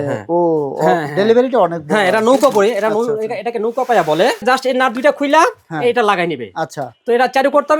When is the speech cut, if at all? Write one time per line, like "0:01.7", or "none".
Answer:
0:04.4